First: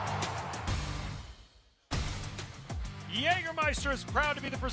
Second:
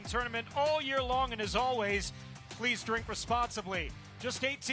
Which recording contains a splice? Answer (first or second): second